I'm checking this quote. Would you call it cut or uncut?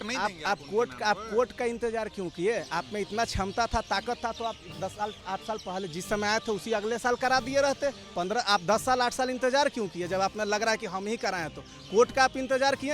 uncut